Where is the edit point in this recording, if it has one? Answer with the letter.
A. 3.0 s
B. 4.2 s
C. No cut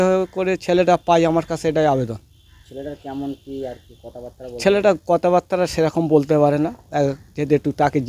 C